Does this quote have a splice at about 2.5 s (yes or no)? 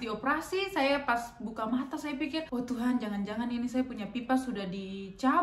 yes